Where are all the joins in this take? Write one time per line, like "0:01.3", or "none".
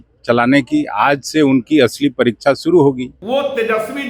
0:03.1